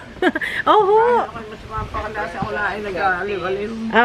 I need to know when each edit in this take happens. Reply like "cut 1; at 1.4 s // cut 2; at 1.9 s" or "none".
none